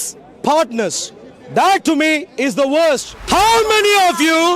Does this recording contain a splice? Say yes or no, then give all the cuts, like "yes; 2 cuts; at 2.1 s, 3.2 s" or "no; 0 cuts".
yes; 1 cut; at 3.1 s